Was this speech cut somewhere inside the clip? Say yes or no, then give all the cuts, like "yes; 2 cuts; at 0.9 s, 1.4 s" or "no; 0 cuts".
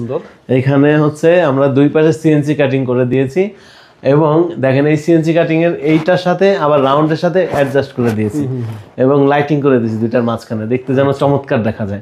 no; 0 cuts